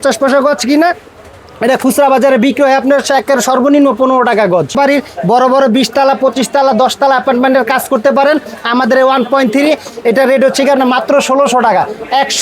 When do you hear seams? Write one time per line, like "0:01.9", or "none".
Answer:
0:04.8